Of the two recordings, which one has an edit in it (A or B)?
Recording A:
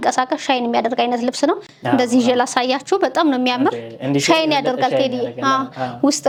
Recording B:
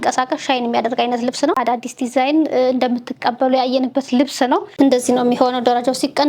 B